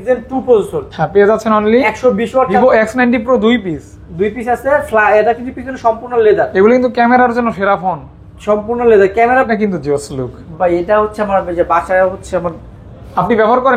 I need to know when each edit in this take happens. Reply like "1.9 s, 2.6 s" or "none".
2.5 s, 9.5 s